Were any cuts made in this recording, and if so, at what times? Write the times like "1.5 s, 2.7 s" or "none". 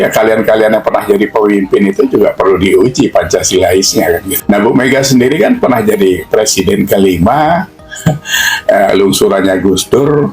4.3 s